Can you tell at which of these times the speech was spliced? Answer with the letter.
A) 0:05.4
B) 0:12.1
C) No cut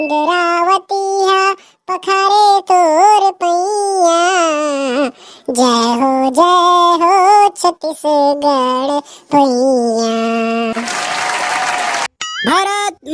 B